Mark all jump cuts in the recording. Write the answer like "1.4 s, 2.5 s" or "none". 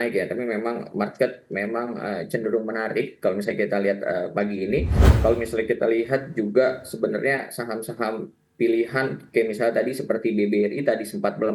5.1 s